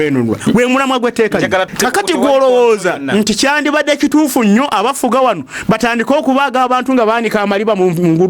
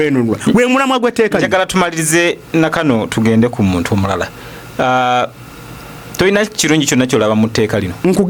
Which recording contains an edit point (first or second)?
first